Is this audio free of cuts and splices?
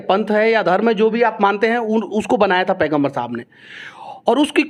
yes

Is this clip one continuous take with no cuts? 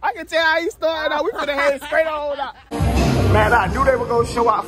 no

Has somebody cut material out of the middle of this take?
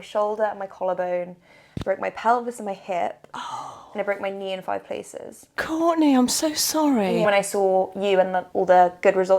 yes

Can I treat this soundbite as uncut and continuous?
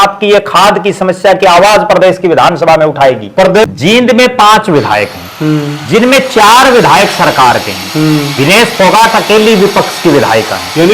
no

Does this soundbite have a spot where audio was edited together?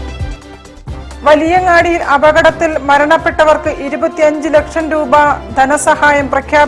no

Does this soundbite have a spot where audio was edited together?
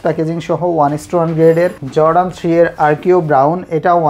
yes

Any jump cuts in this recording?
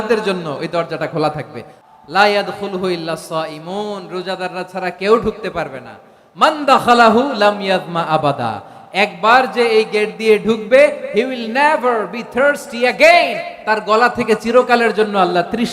yes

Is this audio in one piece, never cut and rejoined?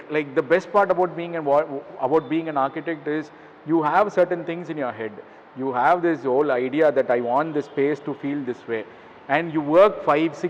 yes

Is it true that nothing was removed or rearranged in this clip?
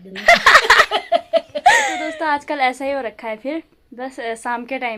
yes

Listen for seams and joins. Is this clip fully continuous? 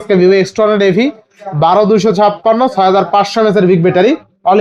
yes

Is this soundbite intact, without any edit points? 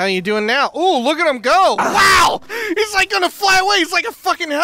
no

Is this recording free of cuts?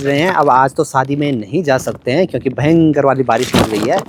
yes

